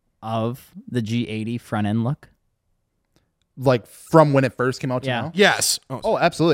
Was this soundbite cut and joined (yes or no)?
no